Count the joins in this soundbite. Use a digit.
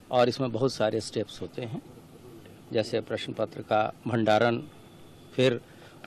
0